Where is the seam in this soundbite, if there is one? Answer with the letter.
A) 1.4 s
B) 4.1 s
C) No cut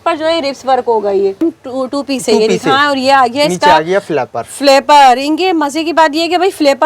A